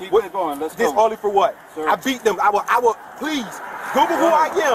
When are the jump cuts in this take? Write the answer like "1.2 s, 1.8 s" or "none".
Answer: 1.2 s